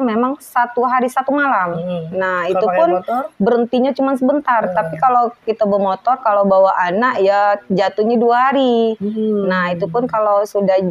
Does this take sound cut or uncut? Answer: uncut